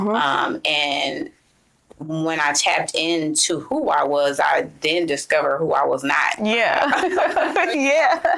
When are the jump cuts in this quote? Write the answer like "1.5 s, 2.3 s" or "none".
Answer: none